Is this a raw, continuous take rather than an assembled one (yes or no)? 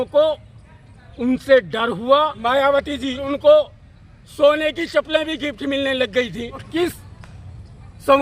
no